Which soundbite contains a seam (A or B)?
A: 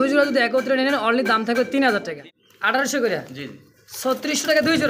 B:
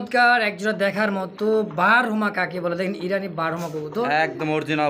A